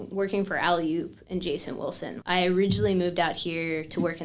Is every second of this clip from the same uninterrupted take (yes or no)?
no